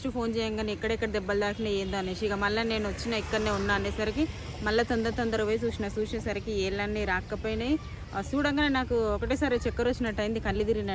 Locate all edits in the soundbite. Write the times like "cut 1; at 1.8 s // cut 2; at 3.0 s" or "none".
none